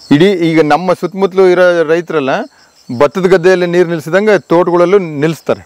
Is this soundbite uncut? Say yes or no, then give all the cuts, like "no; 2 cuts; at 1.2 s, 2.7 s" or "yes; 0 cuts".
yes; 0 cuts